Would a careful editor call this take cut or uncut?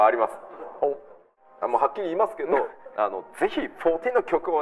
cut